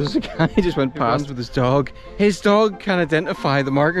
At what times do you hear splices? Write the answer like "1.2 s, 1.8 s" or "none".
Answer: 1.3 s